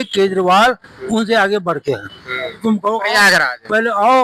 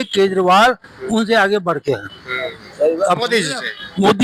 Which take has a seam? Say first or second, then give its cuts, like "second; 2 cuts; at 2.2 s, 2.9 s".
first; 1 cut; at 2.6 s